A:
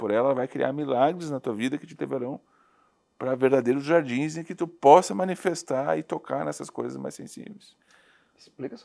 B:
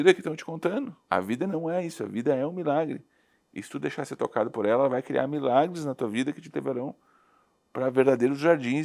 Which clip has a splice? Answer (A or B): B